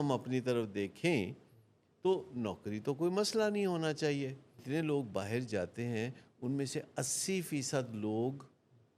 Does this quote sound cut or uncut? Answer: cut